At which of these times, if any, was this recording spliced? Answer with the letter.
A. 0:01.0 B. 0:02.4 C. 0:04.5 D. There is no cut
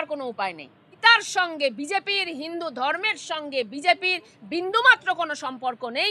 A